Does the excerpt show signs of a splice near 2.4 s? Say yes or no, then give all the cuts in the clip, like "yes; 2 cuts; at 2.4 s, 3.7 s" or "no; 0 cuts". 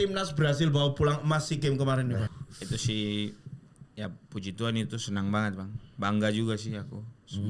yes; 1 cut; at 2.4 s